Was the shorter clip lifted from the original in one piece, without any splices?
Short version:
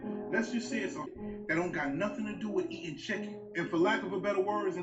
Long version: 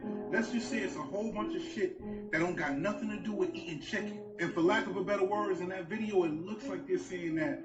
no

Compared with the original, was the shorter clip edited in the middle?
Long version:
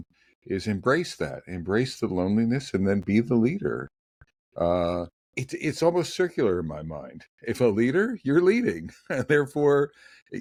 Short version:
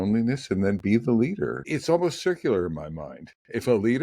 yes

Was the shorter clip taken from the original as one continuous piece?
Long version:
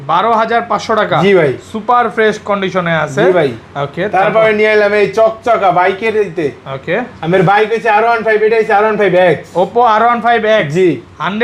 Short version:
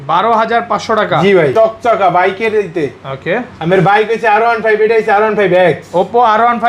no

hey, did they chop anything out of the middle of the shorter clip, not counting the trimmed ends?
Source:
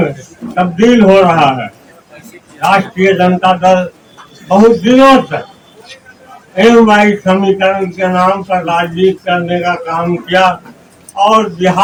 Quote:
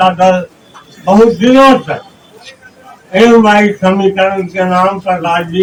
no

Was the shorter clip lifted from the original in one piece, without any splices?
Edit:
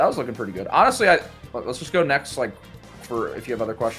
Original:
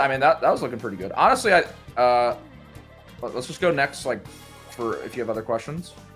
no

